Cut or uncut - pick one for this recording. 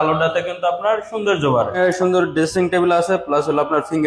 cut